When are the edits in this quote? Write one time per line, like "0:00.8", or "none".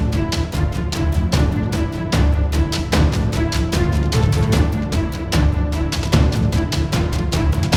none